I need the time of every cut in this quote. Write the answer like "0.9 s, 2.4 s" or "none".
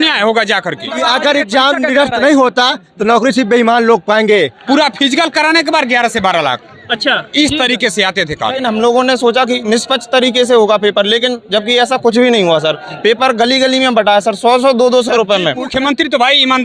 0.9 s, 4.6 s, 8.6 s, 15.6 s